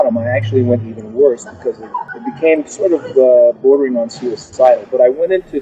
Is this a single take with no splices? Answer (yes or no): yes